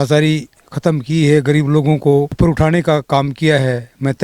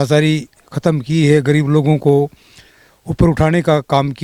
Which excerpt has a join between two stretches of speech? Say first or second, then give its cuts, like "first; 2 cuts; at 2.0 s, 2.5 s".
first; 1 cut; at 2.3 s